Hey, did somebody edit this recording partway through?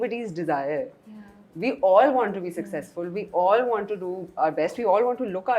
no; 0 cuts

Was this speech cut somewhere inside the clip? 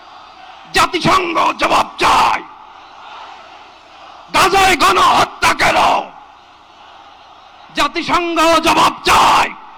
no; 0 cuts

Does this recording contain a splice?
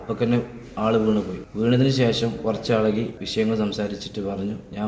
yes; 2 cuts; at 1.4 s, 3.2 s

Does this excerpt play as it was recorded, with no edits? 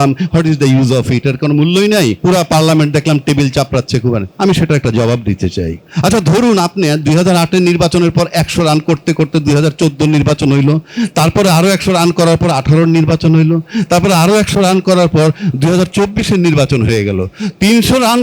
no; 3 cuts; at 2.2 s, 4.3 s, 5.8 s

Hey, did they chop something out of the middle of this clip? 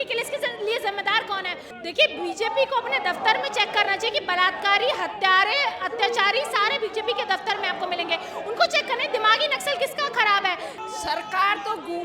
yes; 2 cuts; at 1.7 s, 10.7 s

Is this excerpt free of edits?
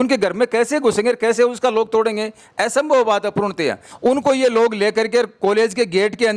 no; 1 cut; at 3.9 s

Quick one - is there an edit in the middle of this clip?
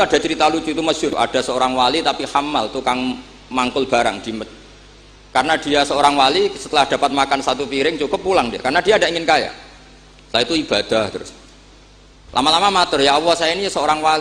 yes; 1 cut; at 1.1 s

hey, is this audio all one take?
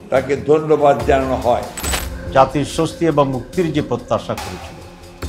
no; 1 cut; at 1.8 s

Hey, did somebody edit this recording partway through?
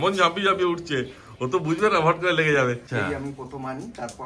yes; 1 cut; at 2.8 s

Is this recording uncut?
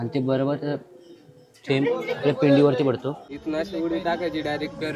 no; 1 cut; at 3.3 s

